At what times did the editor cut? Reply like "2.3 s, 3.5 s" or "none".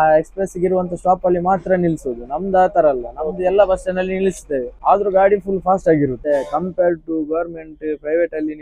4.7 s, 6.2 s